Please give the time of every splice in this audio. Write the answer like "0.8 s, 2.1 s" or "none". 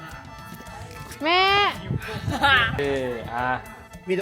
2.8 s